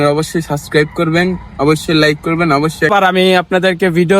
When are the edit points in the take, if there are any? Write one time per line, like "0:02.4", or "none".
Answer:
0:02.9